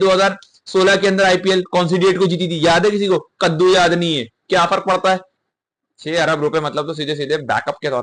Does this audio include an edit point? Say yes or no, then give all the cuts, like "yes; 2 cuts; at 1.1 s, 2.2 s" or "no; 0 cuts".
yes; 1 cut; at 5.3 s